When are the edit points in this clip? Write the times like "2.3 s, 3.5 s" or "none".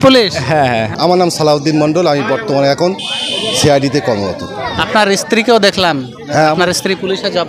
0.9 s